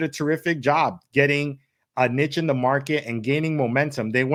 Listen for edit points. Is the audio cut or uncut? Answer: uncut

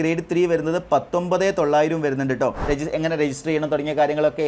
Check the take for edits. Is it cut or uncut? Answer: cut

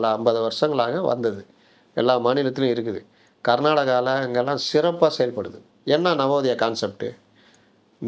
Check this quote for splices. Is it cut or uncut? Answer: uncut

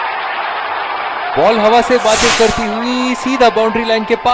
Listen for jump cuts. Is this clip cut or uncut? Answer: cut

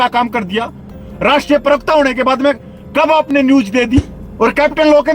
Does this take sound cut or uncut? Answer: cut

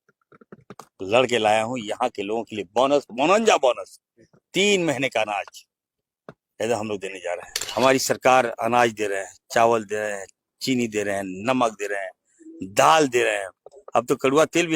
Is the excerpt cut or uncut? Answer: cut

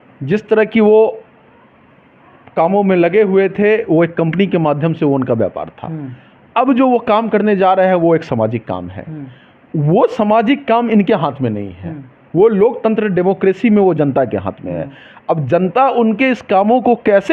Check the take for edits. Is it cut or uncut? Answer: uncut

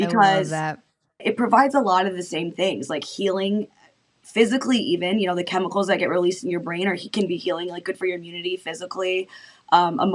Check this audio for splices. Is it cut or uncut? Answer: cut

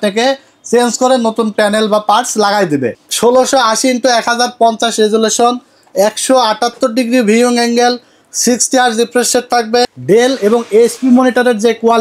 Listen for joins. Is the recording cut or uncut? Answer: cut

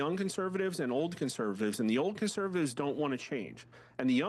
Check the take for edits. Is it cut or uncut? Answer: uncut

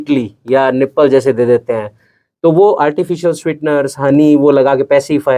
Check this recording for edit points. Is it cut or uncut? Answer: uncut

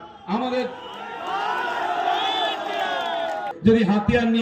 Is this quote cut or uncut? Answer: cut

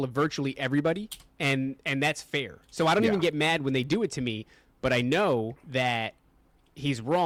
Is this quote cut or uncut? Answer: uncut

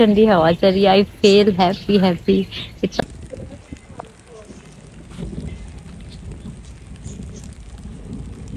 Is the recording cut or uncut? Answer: cut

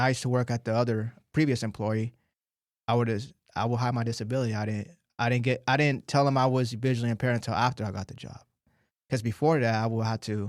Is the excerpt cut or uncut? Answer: uncut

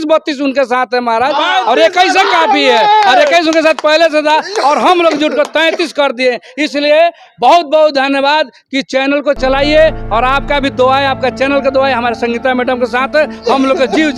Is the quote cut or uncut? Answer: uncut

